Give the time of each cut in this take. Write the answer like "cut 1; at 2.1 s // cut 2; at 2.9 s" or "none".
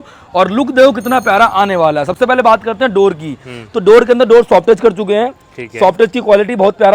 none